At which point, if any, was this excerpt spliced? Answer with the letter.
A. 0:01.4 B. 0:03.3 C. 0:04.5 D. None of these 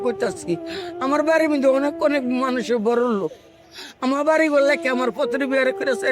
D